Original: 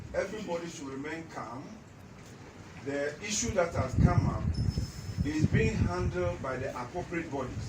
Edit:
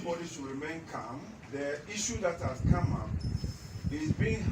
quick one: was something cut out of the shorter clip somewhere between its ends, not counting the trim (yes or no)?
yes